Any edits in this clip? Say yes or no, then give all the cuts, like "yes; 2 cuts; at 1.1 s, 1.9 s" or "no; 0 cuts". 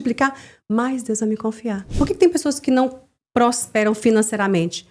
yes; 1 cut; at 1.9 s